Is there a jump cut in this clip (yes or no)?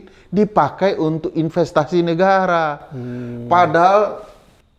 no